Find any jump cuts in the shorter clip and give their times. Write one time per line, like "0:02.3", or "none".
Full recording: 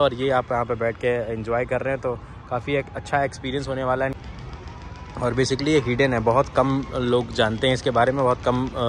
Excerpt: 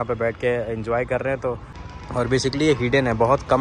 0:01.7